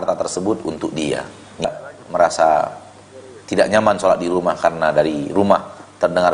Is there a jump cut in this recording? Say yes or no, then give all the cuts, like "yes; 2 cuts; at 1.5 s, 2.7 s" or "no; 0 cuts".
yes; 1 cut; at 1.7 s